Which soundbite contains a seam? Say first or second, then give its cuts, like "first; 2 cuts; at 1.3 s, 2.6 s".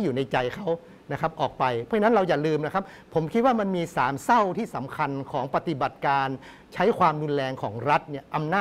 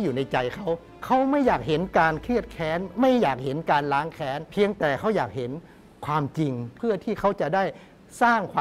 second; 3 cuts; at 0.9 s, 4.4 s, 6.7 s